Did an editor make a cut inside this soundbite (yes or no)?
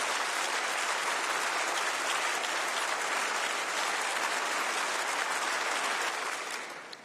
yes